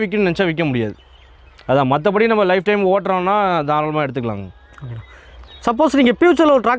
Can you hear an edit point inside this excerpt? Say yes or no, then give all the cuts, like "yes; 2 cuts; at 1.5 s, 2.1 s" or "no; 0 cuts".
no; 0 cuts